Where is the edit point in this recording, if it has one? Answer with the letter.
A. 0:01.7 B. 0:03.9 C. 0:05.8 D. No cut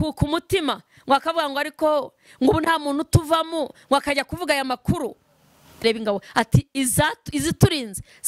C